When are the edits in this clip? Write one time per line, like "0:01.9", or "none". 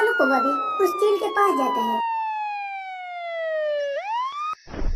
none